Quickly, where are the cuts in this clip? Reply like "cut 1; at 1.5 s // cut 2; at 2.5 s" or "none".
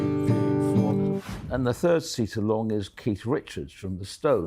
cut 1; at 1.2 s